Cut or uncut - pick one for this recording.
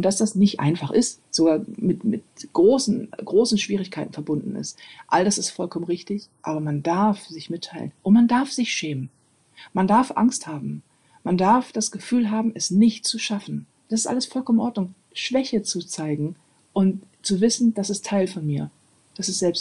cut